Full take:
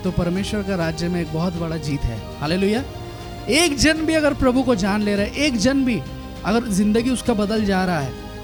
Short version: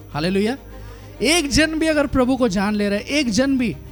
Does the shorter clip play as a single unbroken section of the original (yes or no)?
yes